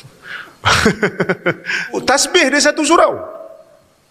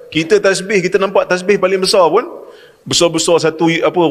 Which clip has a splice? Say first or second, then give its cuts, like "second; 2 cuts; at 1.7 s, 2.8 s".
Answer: first; 1 cut; at 2.0 s